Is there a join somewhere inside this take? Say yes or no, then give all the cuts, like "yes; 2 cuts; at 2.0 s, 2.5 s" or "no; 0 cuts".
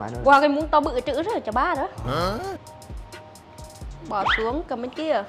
no; 0 cuts